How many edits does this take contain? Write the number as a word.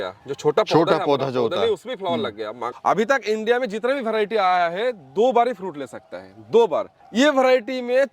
one